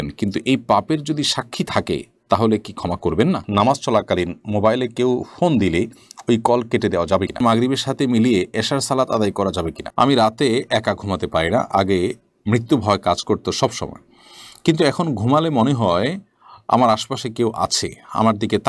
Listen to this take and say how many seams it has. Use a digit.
3